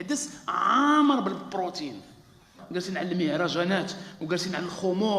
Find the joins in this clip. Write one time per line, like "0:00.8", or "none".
0:02.6